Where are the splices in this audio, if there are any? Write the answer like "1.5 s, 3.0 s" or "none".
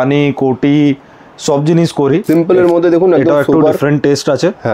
2.2 s